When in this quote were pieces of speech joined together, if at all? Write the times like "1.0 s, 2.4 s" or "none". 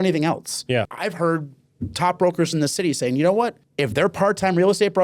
0.9 s, 3.6 s